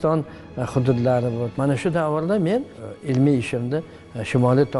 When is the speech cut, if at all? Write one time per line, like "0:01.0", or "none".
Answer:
0:01.5
0:02.8